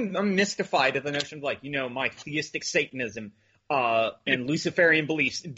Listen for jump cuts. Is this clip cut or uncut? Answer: uncut